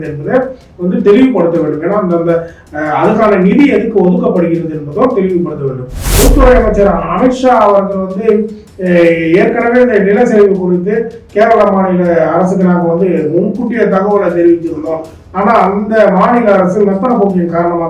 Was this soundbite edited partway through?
yes; 1 cut; at 6.0 s

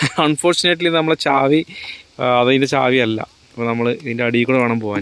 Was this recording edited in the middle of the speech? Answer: no; 0 cuts

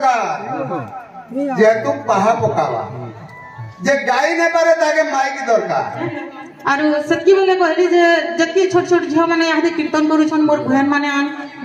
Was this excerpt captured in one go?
no; 1 cut; at 6.2 s

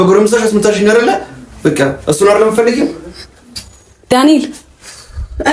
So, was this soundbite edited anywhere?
no; 0 cuts

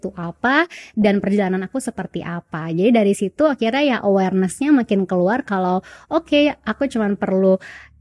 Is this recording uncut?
yes; 0 cuts

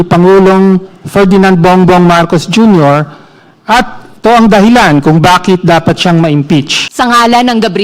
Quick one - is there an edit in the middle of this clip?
yes; 1 cut; at 6.8 s

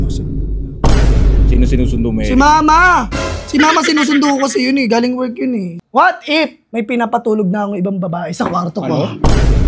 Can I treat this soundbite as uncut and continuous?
no; 2 cuts; at 5.8 s, 6.6 s

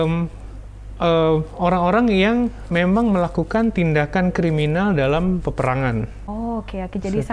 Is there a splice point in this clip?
yes; 1 cut; at 6.2 s

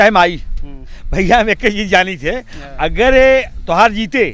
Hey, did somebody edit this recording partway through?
no; 0 cuts

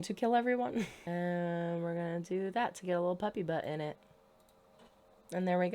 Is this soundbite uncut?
no; 1 cut; at 0.9 s

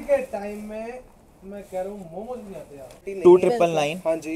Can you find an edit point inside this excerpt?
yes; 1 cut; at 3.0 s

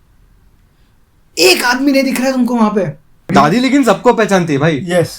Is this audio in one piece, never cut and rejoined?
no; 1 cut; at 3.2 s

